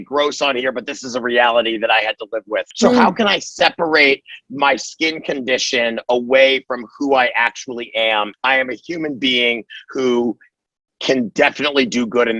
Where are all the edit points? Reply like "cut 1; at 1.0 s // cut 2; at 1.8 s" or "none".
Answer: cut 1; at 2.6 s // cut 2; at 8.3 s

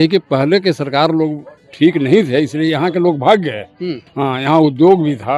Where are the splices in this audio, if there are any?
none

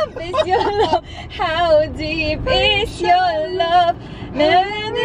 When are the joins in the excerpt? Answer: none

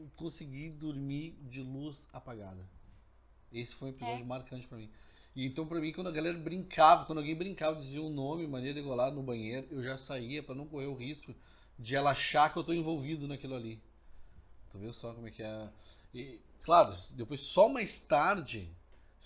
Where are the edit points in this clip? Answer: none

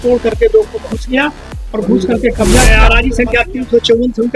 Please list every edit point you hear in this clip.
cut 1; at 2.8 s

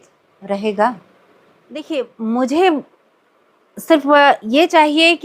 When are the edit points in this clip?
cut 1; at 1.8 s

